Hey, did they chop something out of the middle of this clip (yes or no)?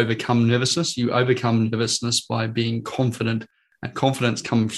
no